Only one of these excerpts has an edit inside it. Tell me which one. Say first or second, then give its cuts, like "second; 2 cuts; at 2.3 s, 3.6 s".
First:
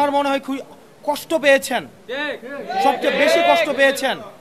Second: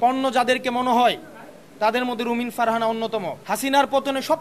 second; 1 cut; at 3.3 s